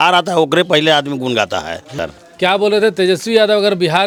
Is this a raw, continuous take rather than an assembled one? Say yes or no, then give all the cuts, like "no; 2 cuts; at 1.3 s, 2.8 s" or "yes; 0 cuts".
yes; 0 cuts